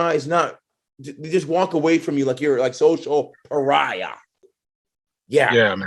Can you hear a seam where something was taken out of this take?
yes; 1 cut; at 4.2 s

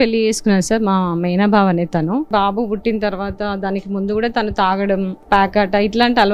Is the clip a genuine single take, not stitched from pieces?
no; 2 cuts; at 2.3 s, 5.2 s

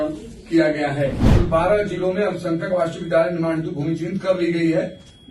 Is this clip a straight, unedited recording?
no; 1 cut; at 1.3 s

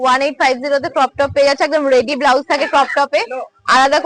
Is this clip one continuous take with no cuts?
yes; 0 cuts

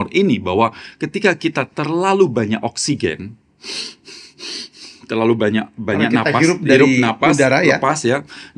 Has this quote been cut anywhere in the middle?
no; 0 cuts

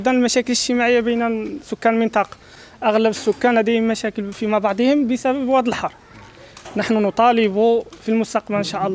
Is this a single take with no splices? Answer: yes; 0 cuts

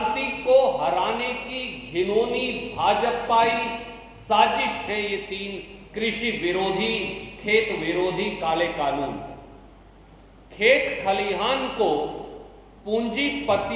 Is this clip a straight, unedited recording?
yes; 0 cuts

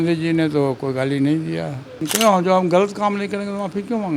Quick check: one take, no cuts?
no; 1 cut; at 2.0 s

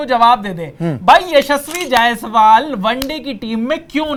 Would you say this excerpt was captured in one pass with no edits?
yes; 0 cuts

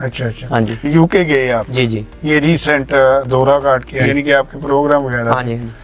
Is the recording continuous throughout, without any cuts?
no; 1 cut; at 4.0 s

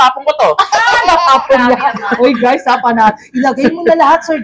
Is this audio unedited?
yes; 0 cuts

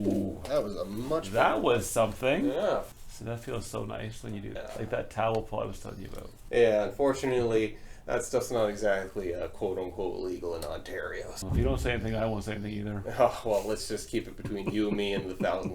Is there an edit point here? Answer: yes; 4 cuts; at 2.9 s, 4.5 s, 6.4 s, 11.4 s

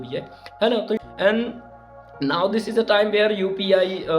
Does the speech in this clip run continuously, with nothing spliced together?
no; 1 cut; at 1.0 s

